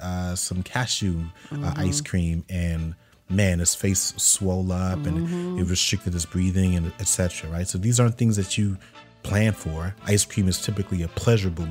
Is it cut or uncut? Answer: uncut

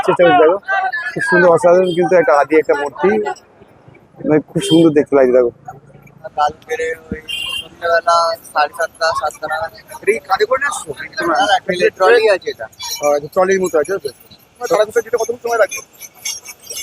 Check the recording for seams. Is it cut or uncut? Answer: cut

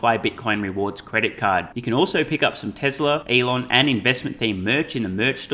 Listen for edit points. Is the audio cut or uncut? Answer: cut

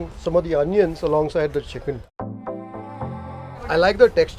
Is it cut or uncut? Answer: cut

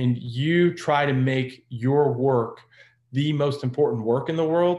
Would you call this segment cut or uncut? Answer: uncut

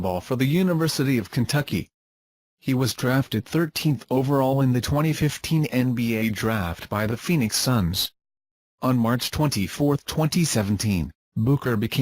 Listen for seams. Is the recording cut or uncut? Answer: cut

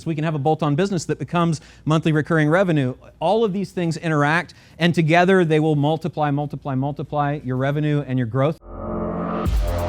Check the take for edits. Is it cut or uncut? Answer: cut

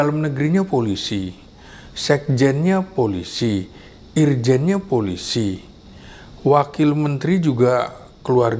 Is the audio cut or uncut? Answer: uncut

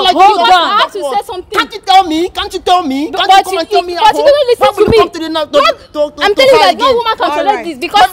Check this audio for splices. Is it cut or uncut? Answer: uncut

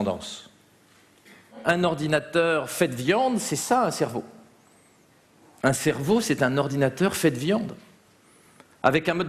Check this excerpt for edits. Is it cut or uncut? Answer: cut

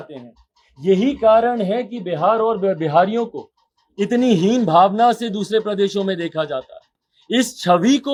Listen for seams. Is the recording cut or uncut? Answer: uncut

